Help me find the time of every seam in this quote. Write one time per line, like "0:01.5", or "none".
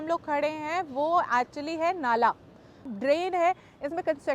0:02.9